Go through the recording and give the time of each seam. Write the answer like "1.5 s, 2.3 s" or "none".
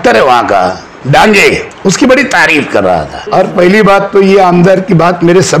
0.9 s, 1.7 s, 3.2 s